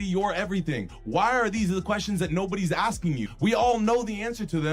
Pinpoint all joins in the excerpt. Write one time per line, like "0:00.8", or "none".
0:03.3